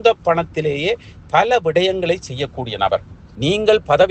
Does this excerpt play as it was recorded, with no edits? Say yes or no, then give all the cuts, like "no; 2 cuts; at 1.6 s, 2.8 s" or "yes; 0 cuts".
no; 1 cut; at 3.2 s